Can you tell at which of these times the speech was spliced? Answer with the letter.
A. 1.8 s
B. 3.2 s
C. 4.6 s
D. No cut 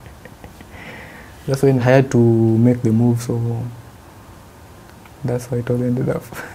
A